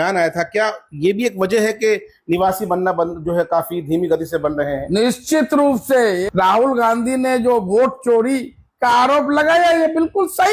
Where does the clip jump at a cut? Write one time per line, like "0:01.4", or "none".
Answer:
0:06.2